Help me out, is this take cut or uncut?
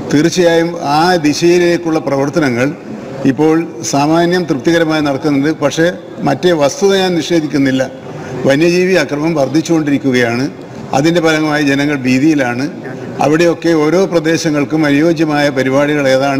uncut